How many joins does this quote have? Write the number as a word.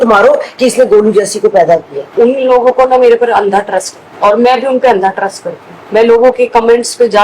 one